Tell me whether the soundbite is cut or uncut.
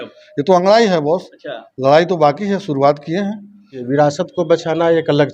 cut